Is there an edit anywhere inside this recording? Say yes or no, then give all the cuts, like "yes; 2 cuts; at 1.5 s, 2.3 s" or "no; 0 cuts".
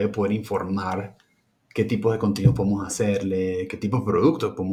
no; 0 cuts